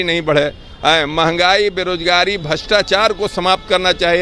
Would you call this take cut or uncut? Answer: uncut